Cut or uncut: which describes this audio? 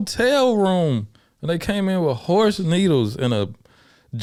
uncut